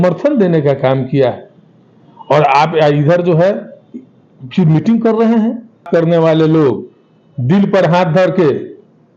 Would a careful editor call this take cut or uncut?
cut